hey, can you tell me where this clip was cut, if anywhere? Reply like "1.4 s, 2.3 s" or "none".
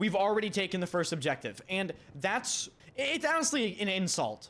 2.8 s